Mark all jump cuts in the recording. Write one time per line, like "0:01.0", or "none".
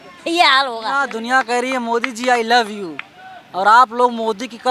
0:01.1

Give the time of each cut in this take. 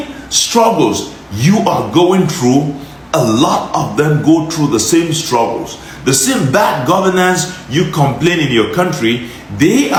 none

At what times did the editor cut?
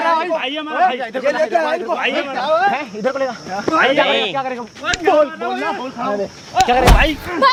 none

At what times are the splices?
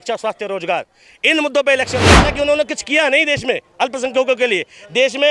0:02.2

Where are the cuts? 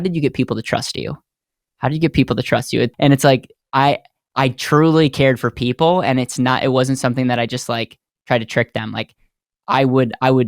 0:02.9

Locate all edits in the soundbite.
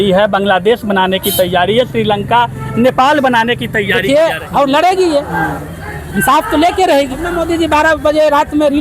0:04.4
0:07.3

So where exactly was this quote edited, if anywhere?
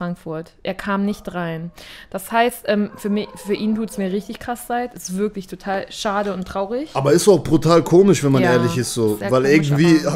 none

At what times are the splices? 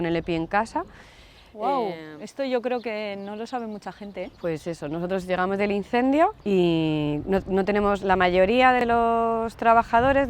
0:06.4
0:08.8

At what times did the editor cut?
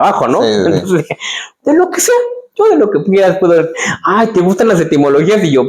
none

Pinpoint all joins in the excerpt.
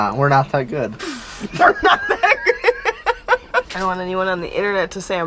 0:03.7

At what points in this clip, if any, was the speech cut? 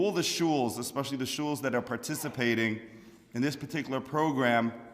0:03.6

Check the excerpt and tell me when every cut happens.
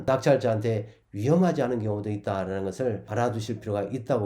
0:03.1

